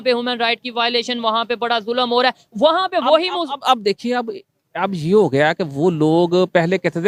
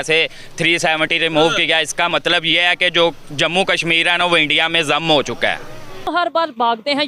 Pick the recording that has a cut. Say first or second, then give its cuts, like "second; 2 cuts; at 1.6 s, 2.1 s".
second; 1 cut; at 6.1 s